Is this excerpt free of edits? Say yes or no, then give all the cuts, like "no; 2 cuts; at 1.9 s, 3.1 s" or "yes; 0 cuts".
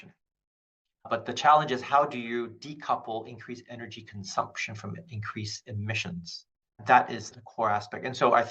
no; 1 cut; at 6.8 s